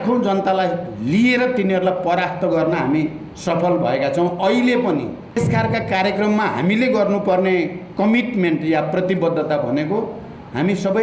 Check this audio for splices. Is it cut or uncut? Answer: cut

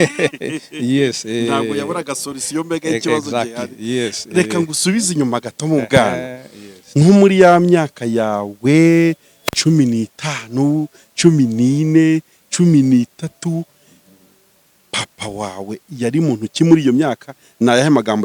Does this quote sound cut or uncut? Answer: uncut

